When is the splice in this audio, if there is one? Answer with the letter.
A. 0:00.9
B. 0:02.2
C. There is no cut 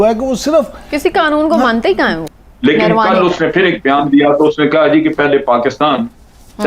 B